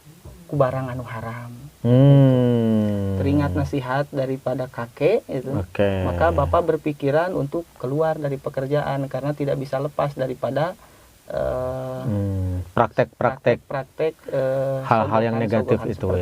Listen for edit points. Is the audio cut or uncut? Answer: uncut